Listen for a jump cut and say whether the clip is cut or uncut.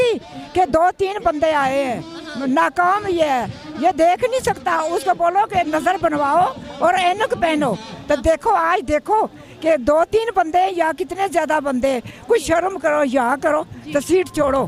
uncut